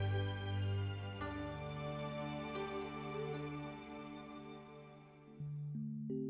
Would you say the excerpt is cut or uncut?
uncut